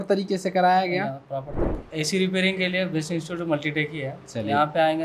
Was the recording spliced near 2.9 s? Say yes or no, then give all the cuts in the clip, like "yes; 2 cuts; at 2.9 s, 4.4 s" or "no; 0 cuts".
no; 1 cut; at 1.6 s